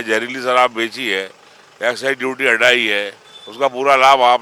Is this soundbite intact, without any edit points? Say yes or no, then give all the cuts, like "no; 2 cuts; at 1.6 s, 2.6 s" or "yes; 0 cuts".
yes; 0 cuts